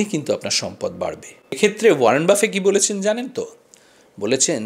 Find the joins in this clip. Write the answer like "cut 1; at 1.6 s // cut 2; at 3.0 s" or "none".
cut 1; at 1.4 s